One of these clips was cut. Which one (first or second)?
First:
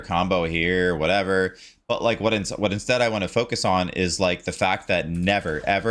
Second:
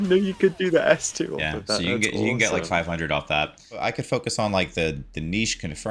second